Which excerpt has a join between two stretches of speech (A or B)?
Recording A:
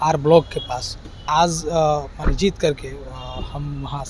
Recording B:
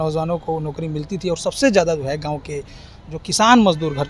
A